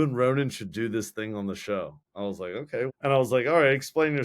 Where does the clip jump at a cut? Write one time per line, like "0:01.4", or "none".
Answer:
0:02.5